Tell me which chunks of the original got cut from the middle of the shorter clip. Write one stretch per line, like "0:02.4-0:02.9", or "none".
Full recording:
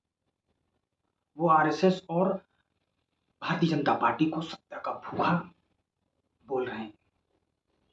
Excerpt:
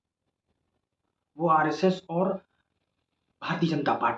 none

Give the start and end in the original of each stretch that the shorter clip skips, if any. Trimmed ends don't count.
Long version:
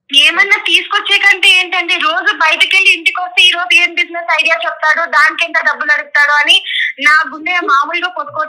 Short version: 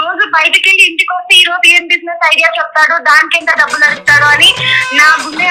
none

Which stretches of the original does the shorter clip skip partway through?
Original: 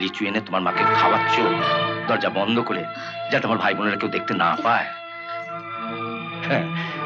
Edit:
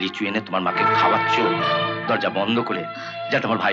none

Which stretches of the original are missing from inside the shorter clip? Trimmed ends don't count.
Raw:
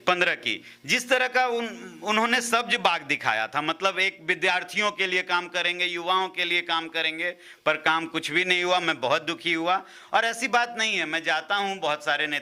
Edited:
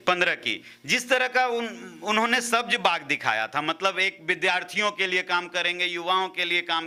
none

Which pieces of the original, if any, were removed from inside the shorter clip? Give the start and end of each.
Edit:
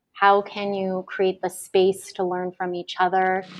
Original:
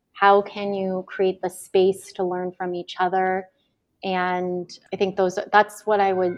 none

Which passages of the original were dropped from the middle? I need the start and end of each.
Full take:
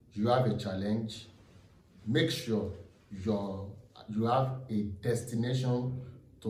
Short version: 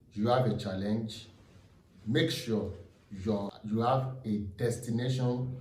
0:03.5-0:04.0

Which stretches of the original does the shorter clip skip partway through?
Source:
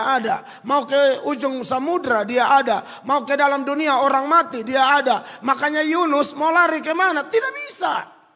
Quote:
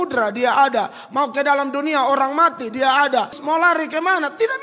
0:05.3-0:06.3

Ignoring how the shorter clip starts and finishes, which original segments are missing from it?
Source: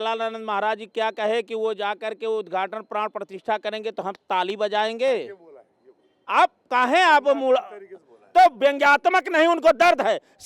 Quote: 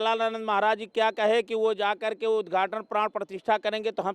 none

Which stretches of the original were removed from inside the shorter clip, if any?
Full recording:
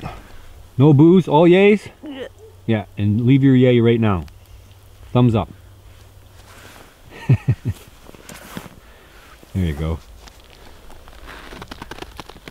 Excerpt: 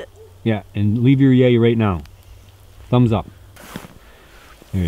0:05.8-0:08.4

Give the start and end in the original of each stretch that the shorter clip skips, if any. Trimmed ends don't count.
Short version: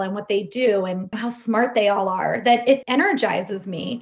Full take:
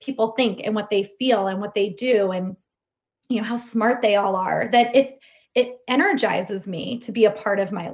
0:02.6-0:03.4
0:05.1-0:05.8

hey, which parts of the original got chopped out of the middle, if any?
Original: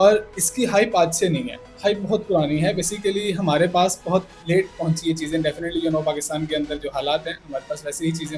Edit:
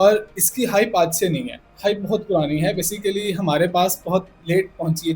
none

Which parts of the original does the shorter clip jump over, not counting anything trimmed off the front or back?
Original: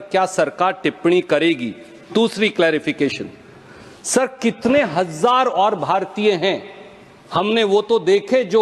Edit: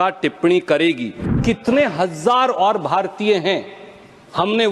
0:02.0-0:04.3

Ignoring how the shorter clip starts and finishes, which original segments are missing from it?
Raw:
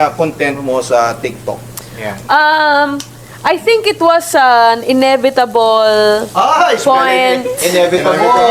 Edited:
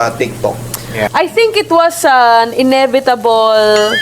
0:02.1-0:03.4

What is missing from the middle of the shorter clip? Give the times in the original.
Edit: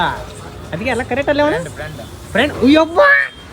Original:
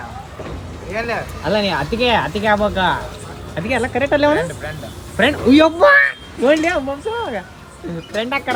none

